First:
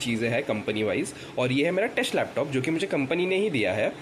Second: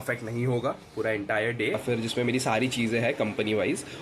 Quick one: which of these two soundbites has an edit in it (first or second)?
second